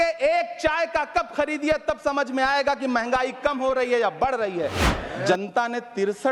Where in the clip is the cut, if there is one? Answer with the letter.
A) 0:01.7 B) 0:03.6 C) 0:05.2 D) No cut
C